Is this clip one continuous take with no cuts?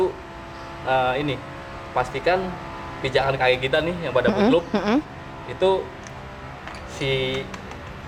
yes; 0 cuts

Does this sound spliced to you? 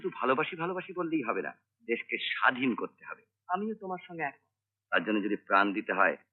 no; 0 cuts

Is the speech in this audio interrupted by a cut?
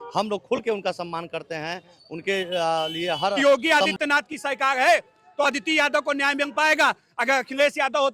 yes; 1 cut; at 3.4 s

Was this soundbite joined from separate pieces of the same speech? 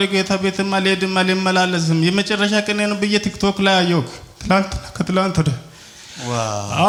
no; 0 cuts

